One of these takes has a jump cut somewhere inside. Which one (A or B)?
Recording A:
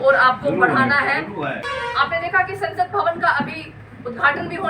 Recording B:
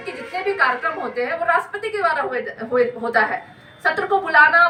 A